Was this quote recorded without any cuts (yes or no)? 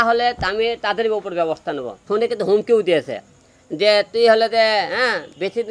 no